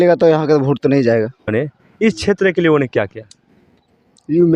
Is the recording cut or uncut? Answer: cut